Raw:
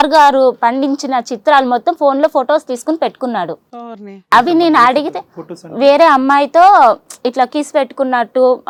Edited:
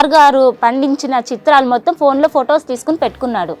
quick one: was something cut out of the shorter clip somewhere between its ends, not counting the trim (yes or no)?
no